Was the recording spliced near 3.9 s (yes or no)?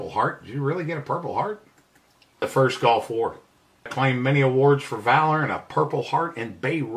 yes